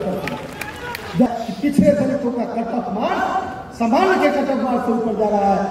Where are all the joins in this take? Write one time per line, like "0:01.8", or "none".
0:01.3

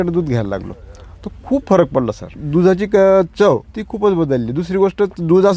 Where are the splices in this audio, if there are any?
0:02.3
0:03.7

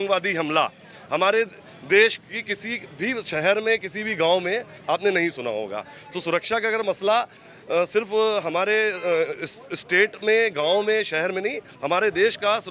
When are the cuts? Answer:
none

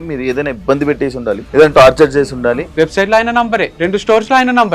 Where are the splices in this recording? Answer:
0:01.4
0:02.6
0:03.7

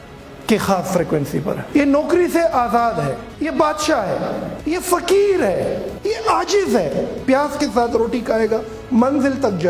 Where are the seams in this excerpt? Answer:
0:01.6
0:04.5
0:07.2

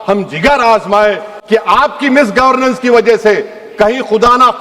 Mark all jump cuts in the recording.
0:01.3

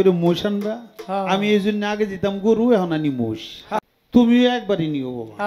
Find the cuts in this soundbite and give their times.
0:03.8

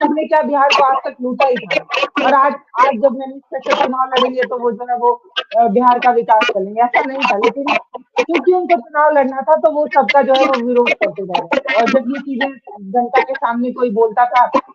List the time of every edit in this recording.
none

